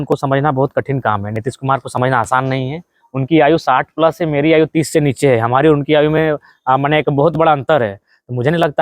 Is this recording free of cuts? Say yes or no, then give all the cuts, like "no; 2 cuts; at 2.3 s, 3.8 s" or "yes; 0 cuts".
yes; 0 cuts